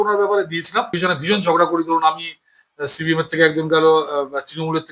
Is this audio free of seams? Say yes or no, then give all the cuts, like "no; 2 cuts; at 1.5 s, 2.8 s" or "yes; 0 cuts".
no; 1 cut; at 0.9 s